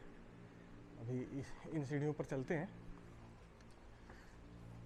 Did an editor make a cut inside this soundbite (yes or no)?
no